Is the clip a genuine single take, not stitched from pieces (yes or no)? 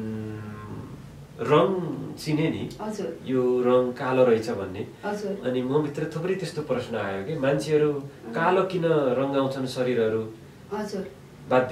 yes